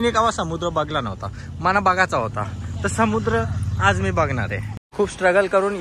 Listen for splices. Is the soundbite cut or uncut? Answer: cut